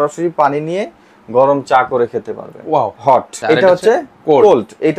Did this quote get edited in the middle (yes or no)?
yes